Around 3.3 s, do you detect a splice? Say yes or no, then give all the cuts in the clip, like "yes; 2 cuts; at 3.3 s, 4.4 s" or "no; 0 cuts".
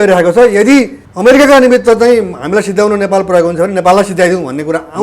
no; 1 cut; at 1.0 s